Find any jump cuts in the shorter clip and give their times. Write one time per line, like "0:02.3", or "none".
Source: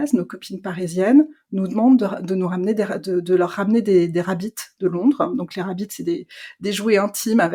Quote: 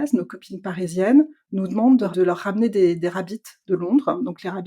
0:02.1